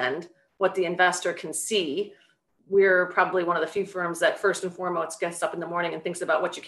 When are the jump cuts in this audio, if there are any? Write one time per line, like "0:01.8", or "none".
none